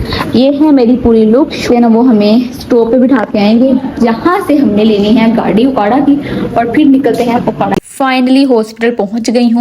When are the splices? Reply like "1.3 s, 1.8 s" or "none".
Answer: 1.7 s, 7.8 s